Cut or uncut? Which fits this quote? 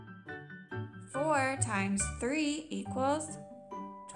cut